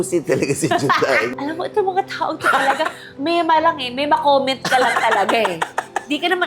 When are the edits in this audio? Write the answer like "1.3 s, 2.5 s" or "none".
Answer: 1.3 s